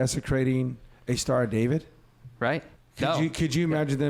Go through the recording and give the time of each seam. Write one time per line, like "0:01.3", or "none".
0:02.8